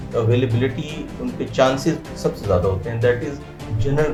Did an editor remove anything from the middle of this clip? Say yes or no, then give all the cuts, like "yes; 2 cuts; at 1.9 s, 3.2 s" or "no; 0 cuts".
no; 0 cuts